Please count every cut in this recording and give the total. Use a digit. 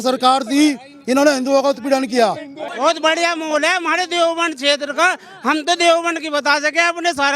1